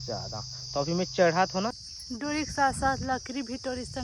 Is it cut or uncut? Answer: cut